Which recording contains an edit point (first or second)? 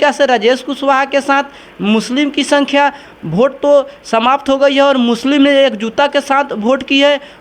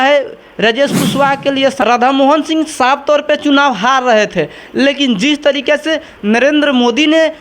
second